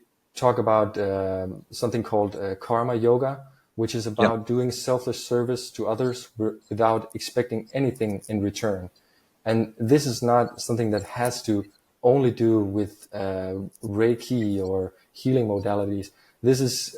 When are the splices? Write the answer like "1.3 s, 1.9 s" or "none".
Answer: 11.8 s